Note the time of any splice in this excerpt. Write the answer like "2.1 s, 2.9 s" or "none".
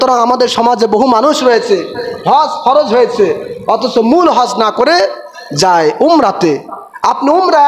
none